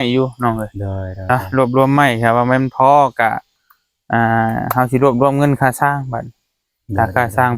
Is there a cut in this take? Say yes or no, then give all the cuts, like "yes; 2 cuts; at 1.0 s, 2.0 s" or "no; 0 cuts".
no; 0 cuts